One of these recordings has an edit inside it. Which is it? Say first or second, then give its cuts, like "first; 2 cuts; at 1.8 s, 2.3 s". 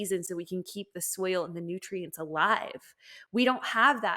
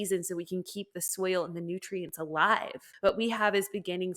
second; 1 cut; at 2.8 s